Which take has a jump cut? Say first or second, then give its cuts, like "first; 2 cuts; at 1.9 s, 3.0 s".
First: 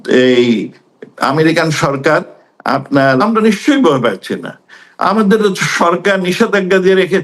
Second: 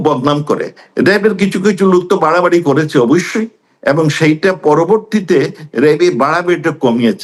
first; 1 cut; at 3.2 s